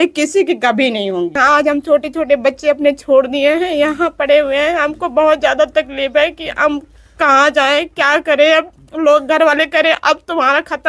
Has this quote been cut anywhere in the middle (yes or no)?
yes